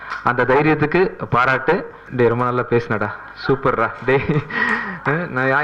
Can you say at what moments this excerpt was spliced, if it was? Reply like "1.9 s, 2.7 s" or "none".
2.0 s